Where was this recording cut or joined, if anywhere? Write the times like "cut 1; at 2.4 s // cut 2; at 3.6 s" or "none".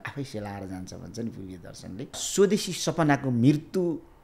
cut 1; at 2.2 s